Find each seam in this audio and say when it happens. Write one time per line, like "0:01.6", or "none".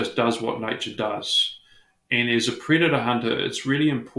none